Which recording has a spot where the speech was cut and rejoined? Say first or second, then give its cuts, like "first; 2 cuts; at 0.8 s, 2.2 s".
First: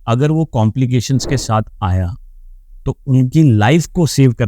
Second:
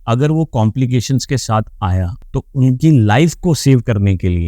second; 1 cut; at 2.2 s